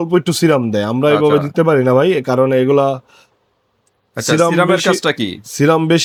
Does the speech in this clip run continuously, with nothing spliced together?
yes; 0 cuts

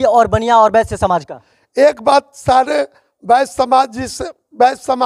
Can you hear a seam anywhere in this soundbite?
no; 0 cuts

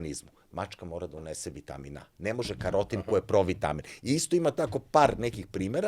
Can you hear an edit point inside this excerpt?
no; 0 cuts

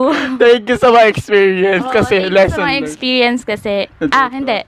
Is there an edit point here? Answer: no; 0 cuts

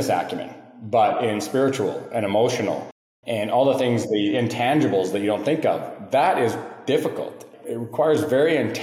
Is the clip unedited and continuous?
no; 1 cut; at 7.5 s

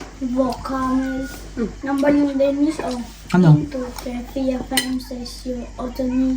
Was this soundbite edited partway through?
yes; 1 cut; at 1.8 s

